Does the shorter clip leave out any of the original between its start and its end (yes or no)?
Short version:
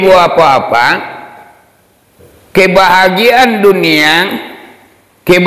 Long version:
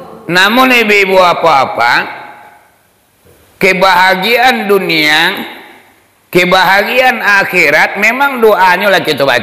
no